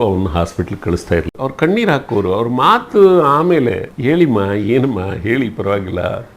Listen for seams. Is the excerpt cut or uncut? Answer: cut